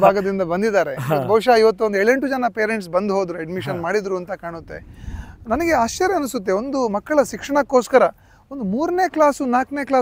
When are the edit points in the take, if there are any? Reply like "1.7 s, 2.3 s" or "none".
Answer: none